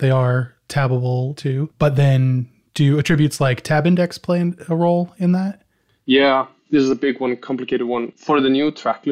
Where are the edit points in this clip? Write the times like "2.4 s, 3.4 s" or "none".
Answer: 1.5 s, 8.1 s